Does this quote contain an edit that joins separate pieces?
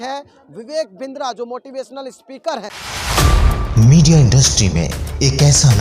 yes; 1 cut; at 2.8 s

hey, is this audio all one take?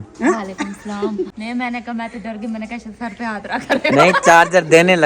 no; 1 cut; at 1.3 s

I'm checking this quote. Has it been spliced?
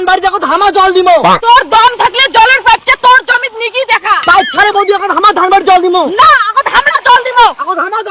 yes; 1 cut; at 4.2 s

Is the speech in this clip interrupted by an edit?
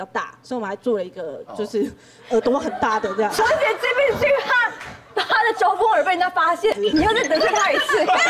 yes; 2 cuts; at 3.4 s, 6.8 s

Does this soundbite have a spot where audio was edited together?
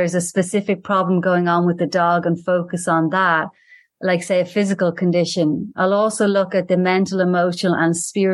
no; 0 cuts

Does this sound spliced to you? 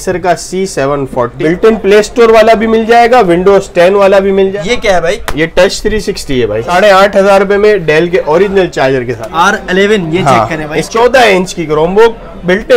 yes; 5 cuts; at 1.3 s, 4.5 s, 6.7 s, 9.2 s, 10.8 s

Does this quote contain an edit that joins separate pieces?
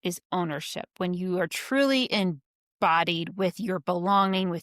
no; 0 cuts

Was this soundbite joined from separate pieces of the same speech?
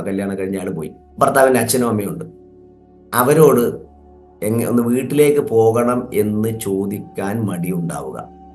no; 0 cuts

